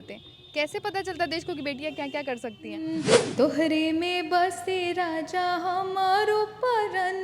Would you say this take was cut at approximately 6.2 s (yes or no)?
no